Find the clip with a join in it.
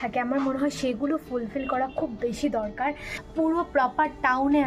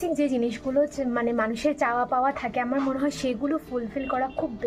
first; 1 cut; at 3.2 s

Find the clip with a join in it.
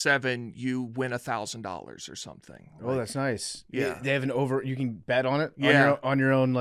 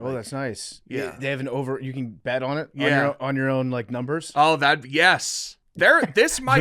second; 1 cut; at 5.3 s

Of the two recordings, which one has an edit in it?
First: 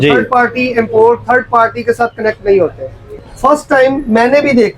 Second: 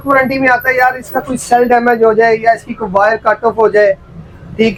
first; 1 cut; at 3.0 s

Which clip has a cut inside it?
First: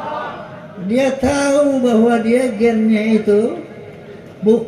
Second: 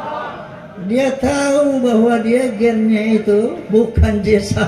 second; 1 cut; at 3.6 s

